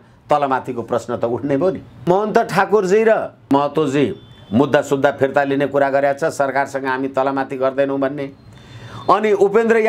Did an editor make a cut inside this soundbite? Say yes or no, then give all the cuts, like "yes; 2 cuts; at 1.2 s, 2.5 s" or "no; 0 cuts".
yes; 2 cuts; at 2.0 s, 3.5 s